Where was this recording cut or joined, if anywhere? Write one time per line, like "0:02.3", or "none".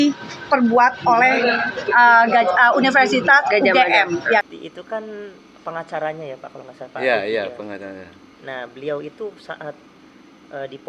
0:04.4